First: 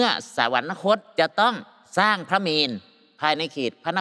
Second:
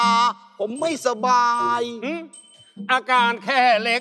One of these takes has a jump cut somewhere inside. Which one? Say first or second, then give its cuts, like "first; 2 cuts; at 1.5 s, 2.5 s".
first; 2 cuts; at 1.1 s, 1.7 s